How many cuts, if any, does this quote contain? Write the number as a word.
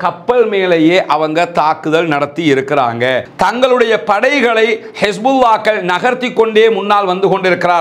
one